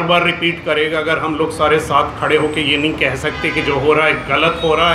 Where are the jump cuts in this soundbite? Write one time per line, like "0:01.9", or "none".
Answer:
none